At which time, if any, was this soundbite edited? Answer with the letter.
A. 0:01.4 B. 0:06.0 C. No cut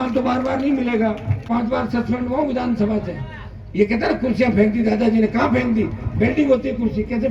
A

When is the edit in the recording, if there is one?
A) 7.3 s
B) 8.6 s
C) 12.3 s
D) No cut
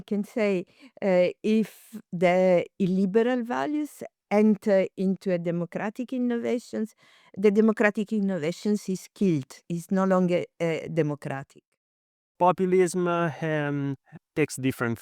C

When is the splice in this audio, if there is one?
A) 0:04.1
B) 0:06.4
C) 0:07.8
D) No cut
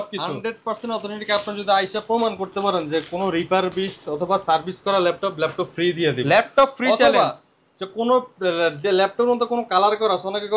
D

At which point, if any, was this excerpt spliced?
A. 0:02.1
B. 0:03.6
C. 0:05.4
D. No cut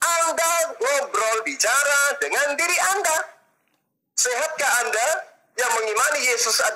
C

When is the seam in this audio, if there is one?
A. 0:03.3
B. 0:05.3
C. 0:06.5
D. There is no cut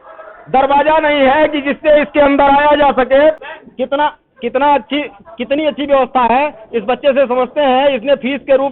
A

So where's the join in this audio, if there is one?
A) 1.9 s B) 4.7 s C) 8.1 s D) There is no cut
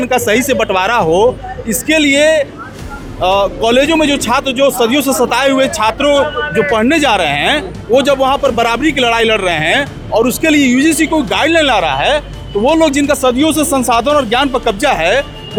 D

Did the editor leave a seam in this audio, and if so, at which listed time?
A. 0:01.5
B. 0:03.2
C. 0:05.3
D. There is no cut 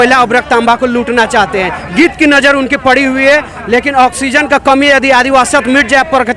D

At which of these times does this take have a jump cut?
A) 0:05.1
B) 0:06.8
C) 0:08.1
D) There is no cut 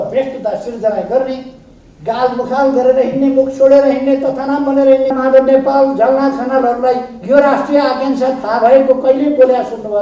A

